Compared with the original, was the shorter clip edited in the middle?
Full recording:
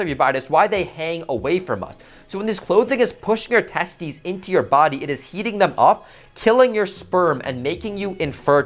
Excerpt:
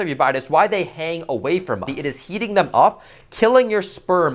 yes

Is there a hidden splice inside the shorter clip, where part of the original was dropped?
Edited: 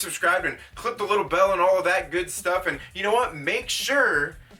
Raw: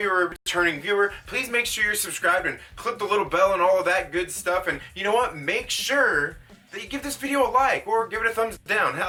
no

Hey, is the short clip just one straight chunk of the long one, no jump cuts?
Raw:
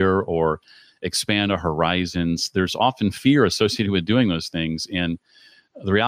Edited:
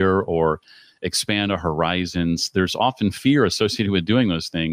yes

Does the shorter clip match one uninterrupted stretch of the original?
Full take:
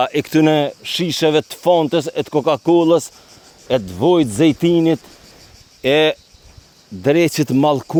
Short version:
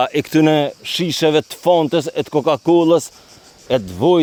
yes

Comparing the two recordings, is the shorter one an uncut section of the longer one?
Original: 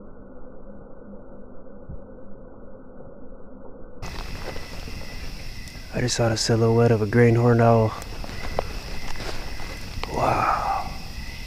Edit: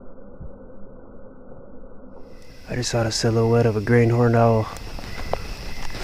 no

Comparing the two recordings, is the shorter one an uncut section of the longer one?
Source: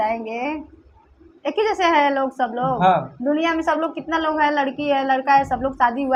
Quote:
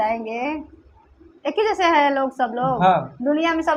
yes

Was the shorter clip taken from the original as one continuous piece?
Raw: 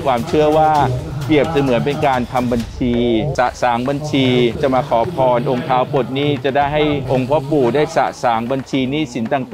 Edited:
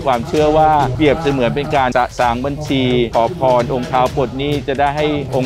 no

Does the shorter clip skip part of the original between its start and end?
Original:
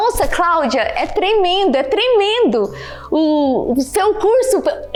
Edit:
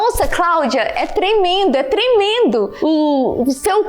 yes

